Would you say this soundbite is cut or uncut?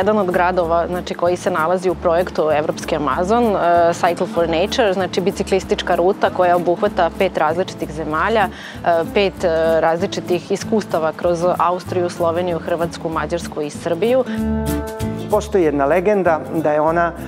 cut